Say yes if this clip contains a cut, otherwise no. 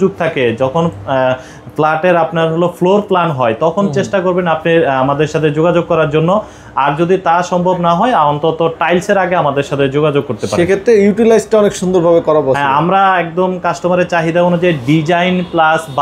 no